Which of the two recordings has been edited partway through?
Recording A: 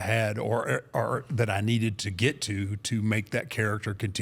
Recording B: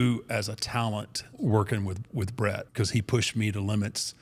B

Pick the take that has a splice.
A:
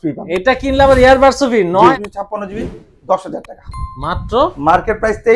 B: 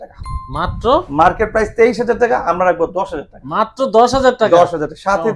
A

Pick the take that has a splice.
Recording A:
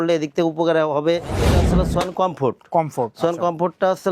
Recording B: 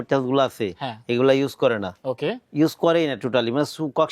A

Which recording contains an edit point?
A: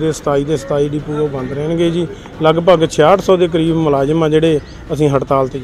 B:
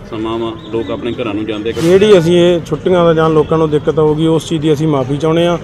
B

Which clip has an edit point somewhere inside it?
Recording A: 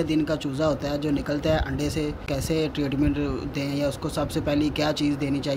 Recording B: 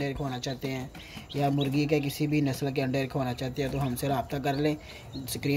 A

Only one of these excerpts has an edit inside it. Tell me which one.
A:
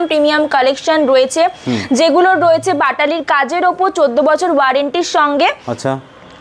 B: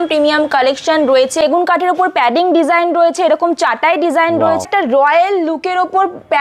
B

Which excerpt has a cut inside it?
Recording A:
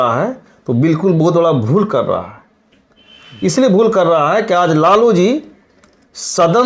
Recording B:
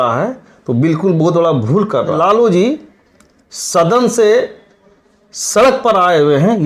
B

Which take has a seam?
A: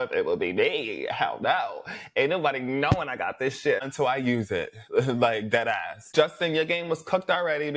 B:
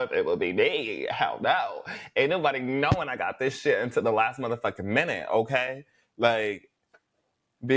A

